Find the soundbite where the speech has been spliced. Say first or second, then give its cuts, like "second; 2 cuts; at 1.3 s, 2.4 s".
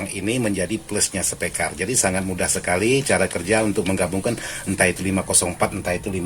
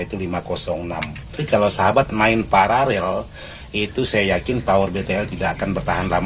second; 1 cut; at 1.4 s